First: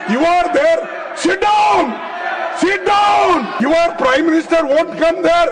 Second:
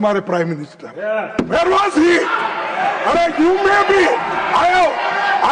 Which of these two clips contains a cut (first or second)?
first